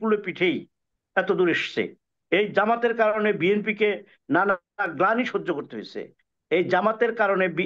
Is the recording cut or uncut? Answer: uncut